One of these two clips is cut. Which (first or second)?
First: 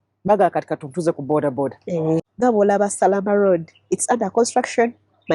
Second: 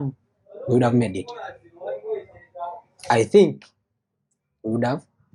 first